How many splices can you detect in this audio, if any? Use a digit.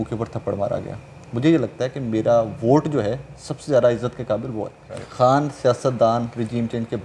1